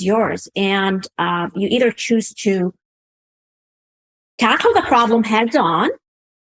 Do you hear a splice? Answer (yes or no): no